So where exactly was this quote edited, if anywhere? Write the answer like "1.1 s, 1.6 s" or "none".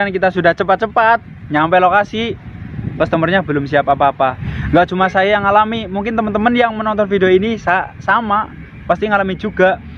4.5 s